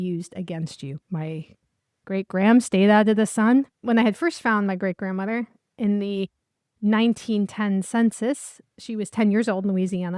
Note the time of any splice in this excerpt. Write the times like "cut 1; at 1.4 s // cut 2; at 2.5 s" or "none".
cut 1; at 1.0 s // cut 2; at 3.8 s